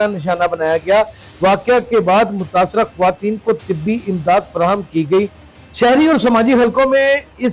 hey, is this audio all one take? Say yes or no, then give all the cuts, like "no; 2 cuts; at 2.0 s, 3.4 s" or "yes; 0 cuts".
no; 1 cut; at 5.4 s